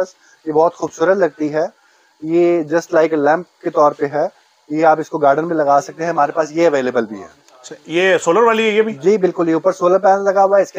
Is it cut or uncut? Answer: uncut